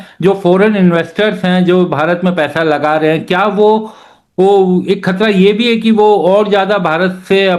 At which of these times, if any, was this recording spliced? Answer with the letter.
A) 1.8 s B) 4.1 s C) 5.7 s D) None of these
D